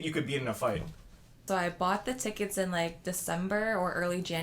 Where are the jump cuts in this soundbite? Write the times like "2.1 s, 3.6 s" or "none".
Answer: 1.5 s